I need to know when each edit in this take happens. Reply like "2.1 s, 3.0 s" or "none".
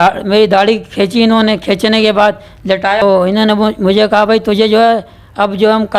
3.0 s